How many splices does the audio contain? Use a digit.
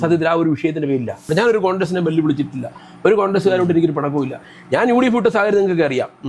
1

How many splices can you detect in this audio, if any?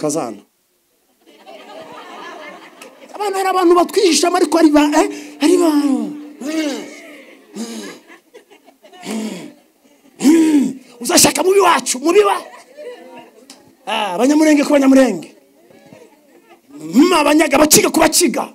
0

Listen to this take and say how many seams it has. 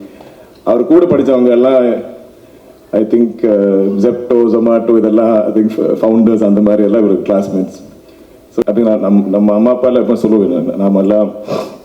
1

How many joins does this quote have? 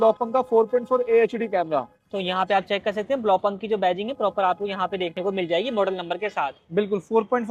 0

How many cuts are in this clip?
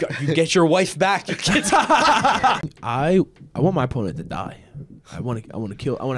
1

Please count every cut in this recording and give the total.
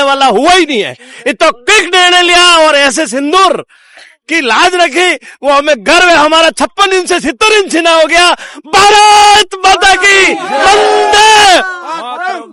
0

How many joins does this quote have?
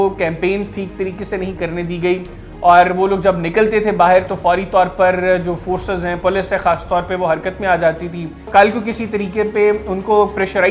1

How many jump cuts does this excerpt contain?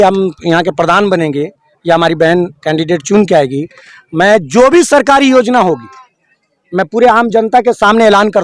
0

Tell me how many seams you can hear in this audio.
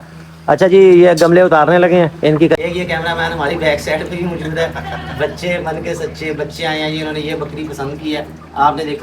1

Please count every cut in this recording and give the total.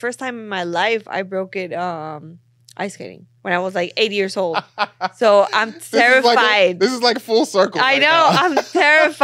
1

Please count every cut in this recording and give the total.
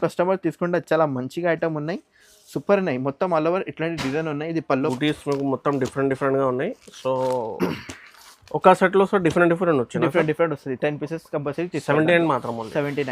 1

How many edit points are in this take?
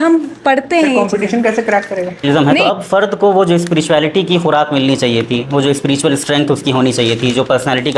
1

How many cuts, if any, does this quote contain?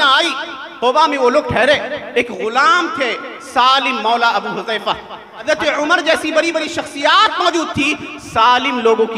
2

